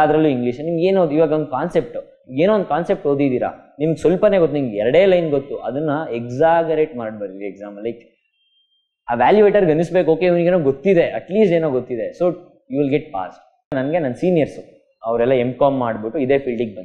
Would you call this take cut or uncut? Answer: cut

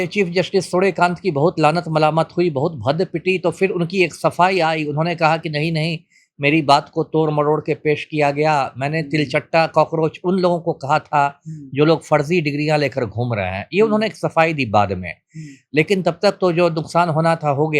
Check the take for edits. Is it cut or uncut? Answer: uncut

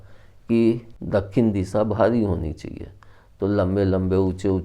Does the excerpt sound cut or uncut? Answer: cut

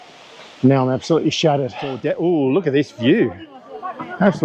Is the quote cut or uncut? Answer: cut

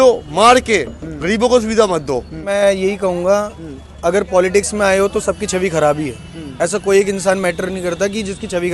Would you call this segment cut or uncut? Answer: cut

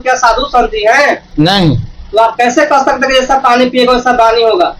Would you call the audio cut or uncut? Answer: uncut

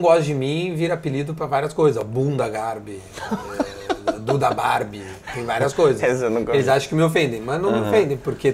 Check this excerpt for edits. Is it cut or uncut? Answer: uncut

